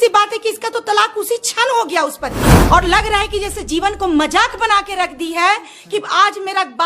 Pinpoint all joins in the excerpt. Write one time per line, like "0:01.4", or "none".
0:02.6